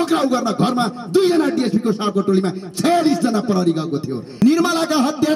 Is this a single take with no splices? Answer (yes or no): no